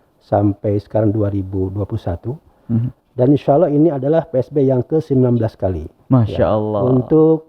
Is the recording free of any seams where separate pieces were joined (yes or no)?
yes